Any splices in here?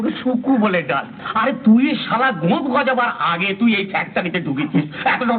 yes; 1 cut; at 1.2 s

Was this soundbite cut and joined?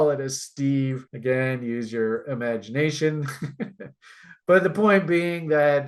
no; 0 cuts

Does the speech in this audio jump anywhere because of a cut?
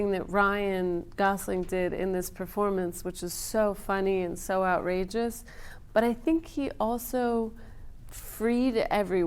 no; 0 cuts

